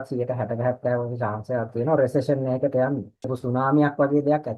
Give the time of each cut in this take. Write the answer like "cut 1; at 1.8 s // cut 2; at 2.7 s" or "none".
cut 1; at 3.4 s